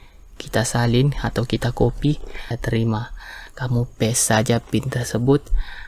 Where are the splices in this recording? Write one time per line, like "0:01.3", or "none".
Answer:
0:02.6